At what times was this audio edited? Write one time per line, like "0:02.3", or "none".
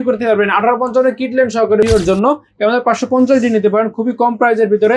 0:01.9